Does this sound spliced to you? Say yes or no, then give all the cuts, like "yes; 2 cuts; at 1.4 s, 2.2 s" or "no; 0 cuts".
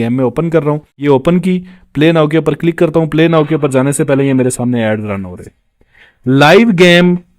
yes; 1 cut; at 0.9 s